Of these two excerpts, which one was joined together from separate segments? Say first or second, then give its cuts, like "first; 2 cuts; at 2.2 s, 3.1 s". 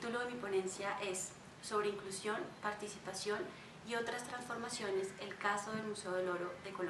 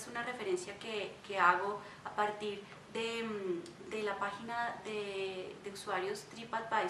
first; 1 cut; at 3.8 s